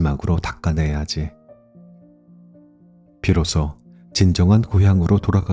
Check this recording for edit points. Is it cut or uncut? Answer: cut